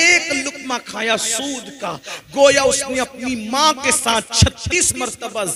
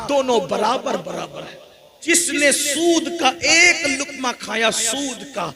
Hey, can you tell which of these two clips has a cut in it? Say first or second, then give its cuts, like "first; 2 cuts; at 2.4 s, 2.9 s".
second; 1 cut; at 1.8 s